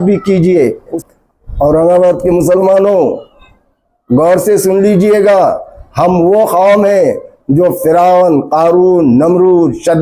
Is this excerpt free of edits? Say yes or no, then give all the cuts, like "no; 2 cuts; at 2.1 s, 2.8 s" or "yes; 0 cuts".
no; 1 cut; at 1.0 s